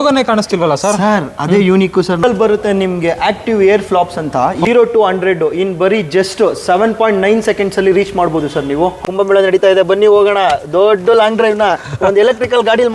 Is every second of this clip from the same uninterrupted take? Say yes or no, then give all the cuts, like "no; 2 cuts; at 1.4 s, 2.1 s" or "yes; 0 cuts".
no; 3 cuts; at 2.2 s, 4.7 s, 9.0 s